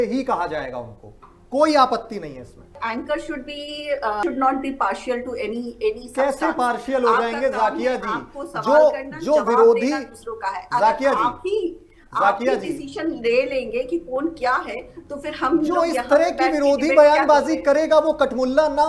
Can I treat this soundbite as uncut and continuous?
no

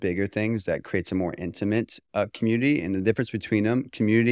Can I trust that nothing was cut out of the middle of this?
yes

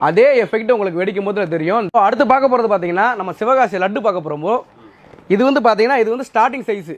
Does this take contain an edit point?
yes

